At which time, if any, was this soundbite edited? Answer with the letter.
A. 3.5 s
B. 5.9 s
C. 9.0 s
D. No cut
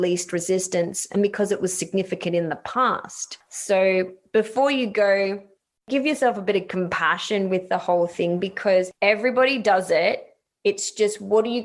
B